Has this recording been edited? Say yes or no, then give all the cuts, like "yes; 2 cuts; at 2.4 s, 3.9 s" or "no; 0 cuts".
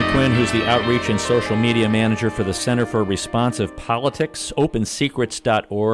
no; 0 cuts